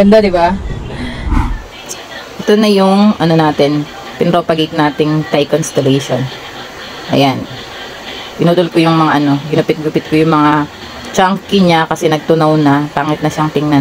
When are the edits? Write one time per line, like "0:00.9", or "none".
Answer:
0:01.3